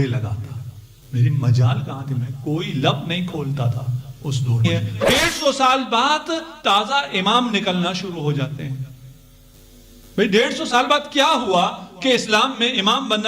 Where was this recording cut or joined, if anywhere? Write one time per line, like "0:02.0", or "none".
0:04.6